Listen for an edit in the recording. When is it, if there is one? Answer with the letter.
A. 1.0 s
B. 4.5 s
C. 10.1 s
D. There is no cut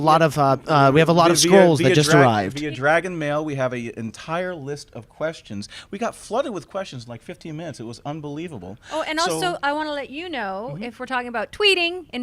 B